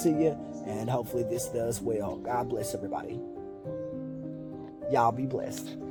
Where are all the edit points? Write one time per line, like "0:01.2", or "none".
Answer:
none